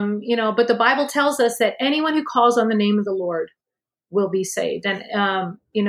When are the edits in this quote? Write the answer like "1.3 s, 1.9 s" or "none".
none

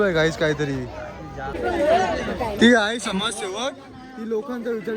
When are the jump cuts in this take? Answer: 1.6 s

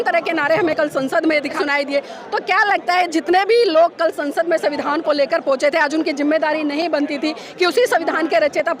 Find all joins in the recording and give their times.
1.6 s

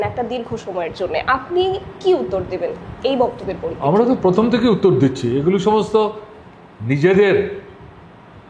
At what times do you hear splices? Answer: none

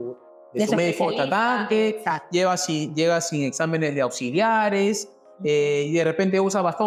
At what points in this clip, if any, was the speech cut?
none

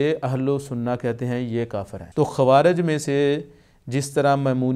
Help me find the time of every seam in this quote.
2.0 s

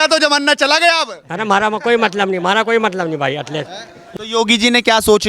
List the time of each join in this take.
4.0 s

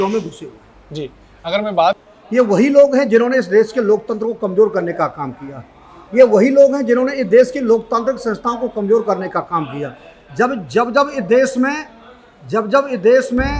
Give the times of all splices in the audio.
2.0 s

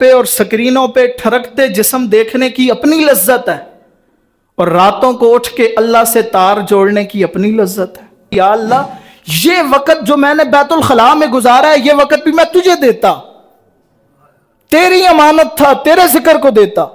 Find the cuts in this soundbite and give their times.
8.3 s

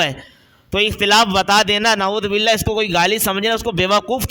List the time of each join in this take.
none

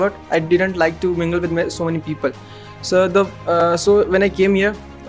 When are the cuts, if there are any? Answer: none

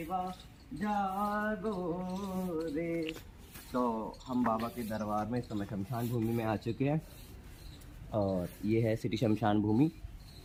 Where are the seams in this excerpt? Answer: none

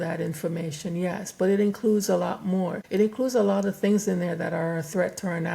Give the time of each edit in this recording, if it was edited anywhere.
2.8 s

